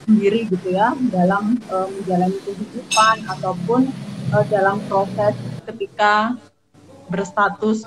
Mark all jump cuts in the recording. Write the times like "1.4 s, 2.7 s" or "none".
5.5 s